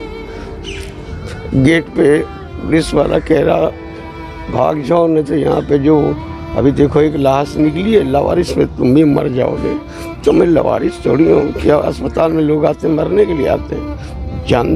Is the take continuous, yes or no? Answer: yes